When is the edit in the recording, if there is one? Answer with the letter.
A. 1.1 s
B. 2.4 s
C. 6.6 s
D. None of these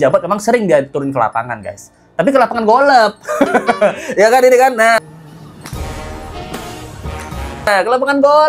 D